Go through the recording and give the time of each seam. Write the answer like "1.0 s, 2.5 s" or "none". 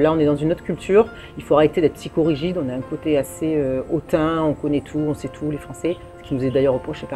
none